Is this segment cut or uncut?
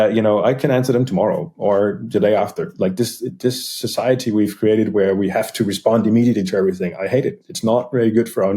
cut